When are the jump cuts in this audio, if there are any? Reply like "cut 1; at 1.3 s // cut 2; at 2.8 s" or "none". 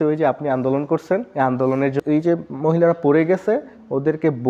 cut 1; at 2.0 s

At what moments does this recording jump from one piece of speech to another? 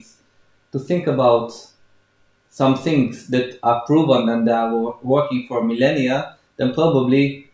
none

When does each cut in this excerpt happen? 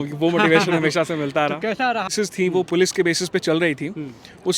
cut 1; at 2.1 s

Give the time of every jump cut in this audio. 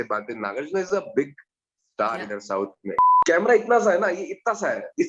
cut 1; at 3.1 s

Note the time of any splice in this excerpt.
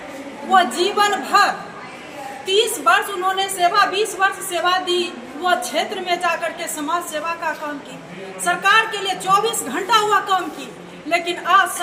none

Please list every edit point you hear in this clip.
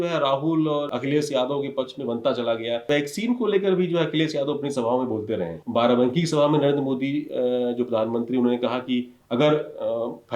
cut 1; at 0.9 s // cut 2; at 2.8 s // cut 3; at 5.6 s

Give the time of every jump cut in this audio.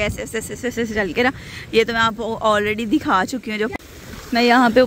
cut 1; at 3.7 s

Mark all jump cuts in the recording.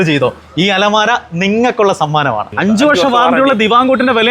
cut 1; at 2.5 s

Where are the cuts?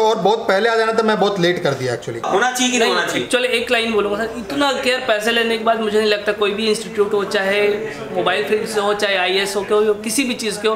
cut 1; at 2.3 s

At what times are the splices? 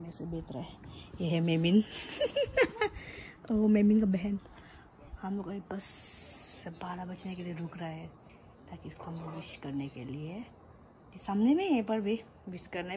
none

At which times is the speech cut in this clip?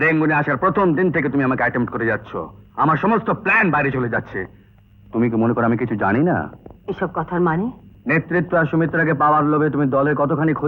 cut 1; at 7.9 s

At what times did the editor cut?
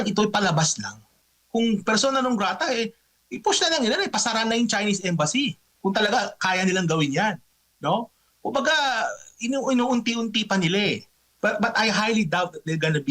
cut 1; at 1.2 s

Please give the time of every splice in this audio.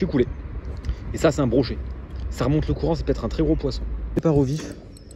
cut 1; at 4.2 s

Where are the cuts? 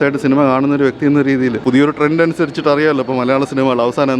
cut 1; at 1.6 s

